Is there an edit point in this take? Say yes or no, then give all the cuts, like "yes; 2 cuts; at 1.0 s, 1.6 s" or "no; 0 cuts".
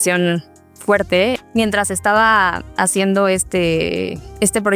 yes; 1 cut; at 1.4 s